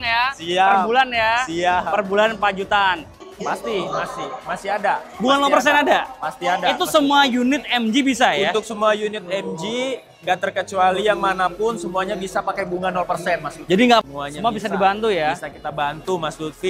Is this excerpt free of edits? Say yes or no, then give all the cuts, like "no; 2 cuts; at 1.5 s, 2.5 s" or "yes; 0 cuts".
no; 2 cuts; at 3.2 s, 14.0 s